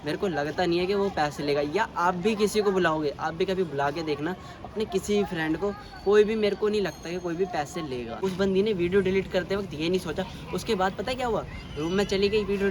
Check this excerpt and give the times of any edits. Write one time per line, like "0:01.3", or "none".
0:08.2